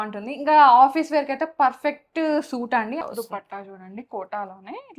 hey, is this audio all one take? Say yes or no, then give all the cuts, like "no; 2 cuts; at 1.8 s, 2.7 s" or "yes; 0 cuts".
no; 1 cut; at 3.0 s